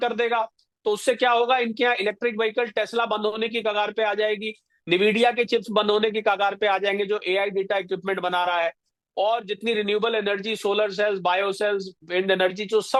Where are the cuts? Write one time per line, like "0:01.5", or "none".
none